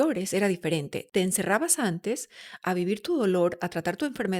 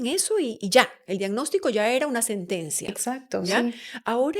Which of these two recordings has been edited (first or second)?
first